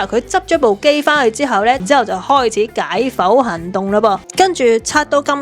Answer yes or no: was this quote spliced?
yes